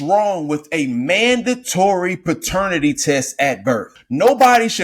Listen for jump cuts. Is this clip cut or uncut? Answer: cut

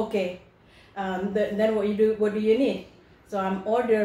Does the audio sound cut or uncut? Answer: uncut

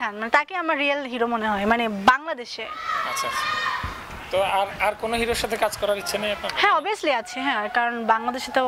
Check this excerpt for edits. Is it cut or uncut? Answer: uncut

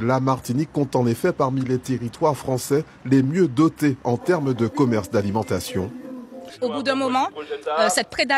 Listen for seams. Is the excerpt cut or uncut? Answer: cut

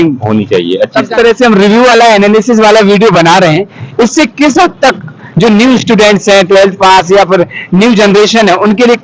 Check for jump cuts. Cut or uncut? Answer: cut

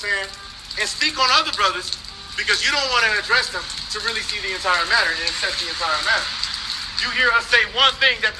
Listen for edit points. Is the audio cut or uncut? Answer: cut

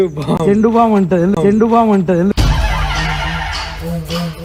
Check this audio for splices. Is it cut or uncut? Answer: uncut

